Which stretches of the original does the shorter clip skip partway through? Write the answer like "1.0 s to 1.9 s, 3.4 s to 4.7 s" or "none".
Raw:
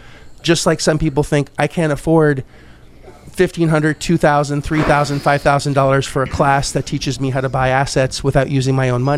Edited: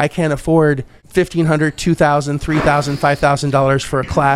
2.5 s to 3.2 s

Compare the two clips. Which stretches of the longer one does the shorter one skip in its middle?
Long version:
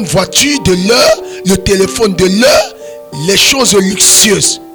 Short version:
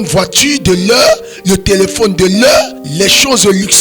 2.8 s to 3.1 s

